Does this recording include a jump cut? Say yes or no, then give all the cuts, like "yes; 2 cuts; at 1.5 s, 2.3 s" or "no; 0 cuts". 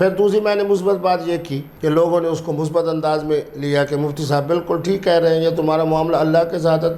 yes; 1 cut; at 1.8 s